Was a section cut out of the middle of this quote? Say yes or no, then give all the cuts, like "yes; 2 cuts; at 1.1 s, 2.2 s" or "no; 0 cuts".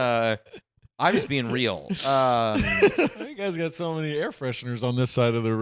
yes; 1 cut; at 3.2 s